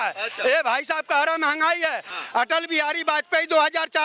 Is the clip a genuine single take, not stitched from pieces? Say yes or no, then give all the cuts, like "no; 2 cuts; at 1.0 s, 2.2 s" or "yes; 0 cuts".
no; 1 cut; at 2.2 s